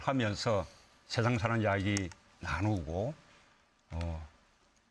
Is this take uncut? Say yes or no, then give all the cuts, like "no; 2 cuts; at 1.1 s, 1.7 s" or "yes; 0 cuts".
no; 1 cut; at 2.4 s